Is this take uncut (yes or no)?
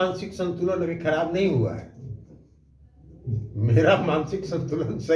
yes